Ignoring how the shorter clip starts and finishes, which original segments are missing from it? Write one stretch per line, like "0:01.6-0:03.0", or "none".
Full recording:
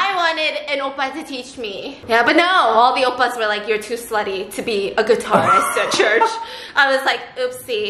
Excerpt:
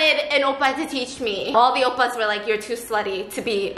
0:01.9-0:02.7